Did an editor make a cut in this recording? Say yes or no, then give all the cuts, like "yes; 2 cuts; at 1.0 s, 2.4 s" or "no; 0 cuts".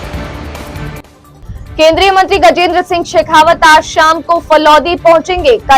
no; 0 cuts